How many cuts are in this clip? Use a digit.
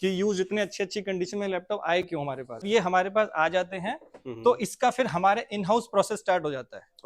1